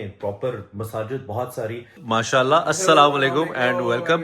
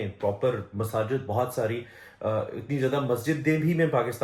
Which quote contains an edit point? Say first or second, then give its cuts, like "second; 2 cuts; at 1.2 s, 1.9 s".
first; 1 cut; at 2.0 s